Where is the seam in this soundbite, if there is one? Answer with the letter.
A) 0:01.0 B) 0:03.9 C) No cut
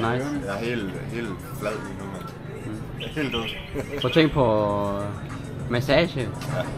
C